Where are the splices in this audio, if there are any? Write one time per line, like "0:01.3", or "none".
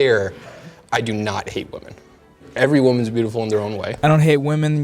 0:03.9